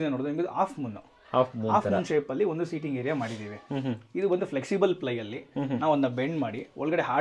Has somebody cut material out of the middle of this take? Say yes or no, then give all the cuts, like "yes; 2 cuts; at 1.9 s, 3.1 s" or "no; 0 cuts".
no; 0 cuts